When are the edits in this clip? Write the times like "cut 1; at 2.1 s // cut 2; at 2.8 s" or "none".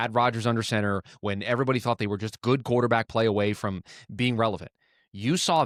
none